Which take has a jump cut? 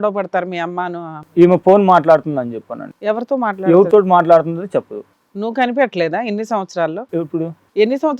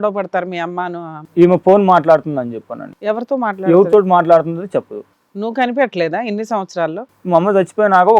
second; 1 cut; at 7.1 s

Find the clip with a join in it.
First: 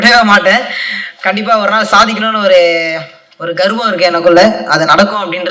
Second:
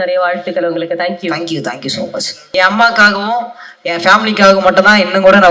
second; 1 cut; at 2.4 s

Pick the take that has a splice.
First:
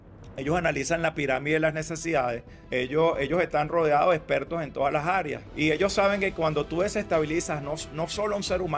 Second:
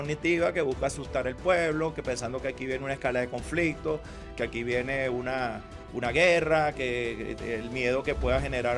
first; 2 cuts; at 2.5 s, 5.4 s

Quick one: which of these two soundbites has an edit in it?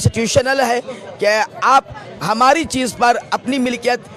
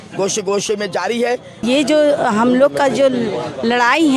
second; 1 cut; at 1.6 s

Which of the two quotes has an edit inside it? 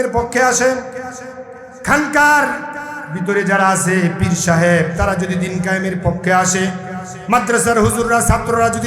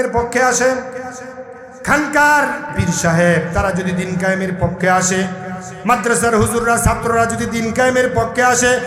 second; 1 cut; at 2.8 s

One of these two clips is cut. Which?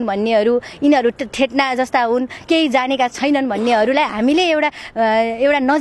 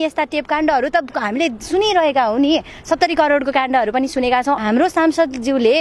second; 1 cut; at 4.6 s

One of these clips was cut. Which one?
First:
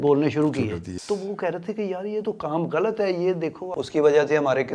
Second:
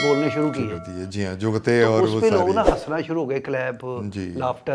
first; 2 cuts; at 0.9 s, 3.7 s

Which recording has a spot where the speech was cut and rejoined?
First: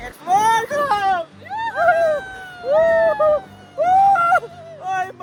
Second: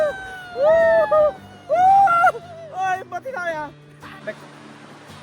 second; 1 cut; at 4.2 s

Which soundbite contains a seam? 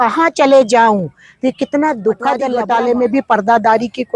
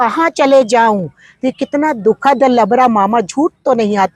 first; 1 cut; at 2.5 s

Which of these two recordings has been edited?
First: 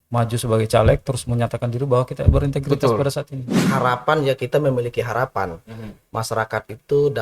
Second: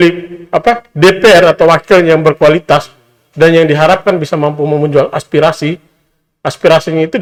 first; 1 cut; at 3.6 s

